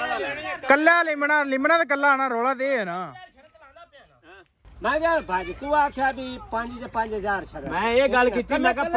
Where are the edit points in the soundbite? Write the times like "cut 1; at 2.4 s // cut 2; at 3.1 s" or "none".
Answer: cut 1; at 4.6 s